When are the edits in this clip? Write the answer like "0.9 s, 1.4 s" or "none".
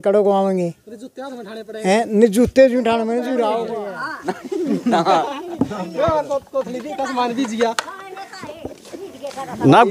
3.7 s